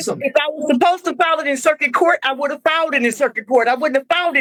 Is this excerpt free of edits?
yes; 0 cuts

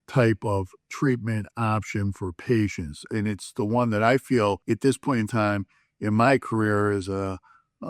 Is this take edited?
yes; 1 cut; at 4.6 s

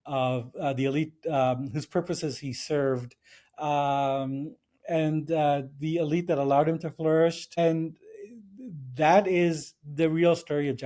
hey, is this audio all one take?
no; 1 cut; at 7.5 s

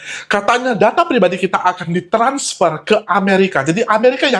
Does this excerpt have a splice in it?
no; 0 cuts

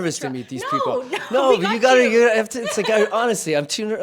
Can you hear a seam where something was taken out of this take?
no; 0 cuts

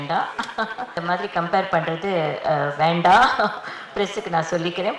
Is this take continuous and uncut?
no; 1 cut; at 1.0 s

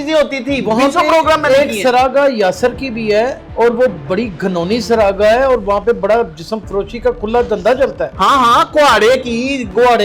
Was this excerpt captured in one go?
yes; 0 cuts

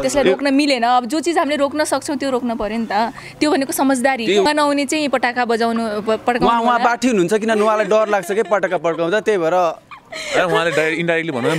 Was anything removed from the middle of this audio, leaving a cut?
yes; 1 cut; at 4.5 s

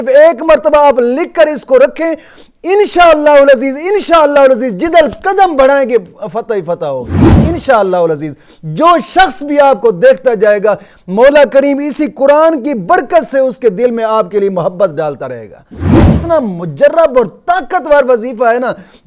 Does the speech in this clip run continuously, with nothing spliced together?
no; 1 cut; at 16.0 s

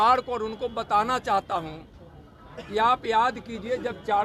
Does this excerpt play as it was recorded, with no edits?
yes; 0 cuts

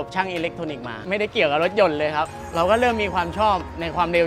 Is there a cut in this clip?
yes; 2 cuts; at 0.9 s, 2.4 s

